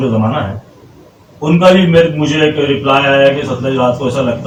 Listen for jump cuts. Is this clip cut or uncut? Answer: uncut